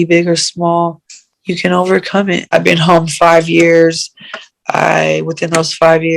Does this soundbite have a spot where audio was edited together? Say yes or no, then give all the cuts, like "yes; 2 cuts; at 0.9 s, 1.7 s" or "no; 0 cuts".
yes; 1 cut; at 2.5 s